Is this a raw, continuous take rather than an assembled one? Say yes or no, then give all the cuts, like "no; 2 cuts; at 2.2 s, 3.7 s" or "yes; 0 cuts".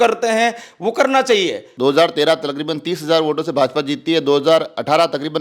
no; 1 cut; at 1.6 s